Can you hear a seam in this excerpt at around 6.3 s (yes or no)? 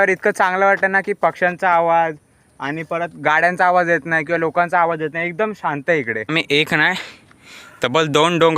yes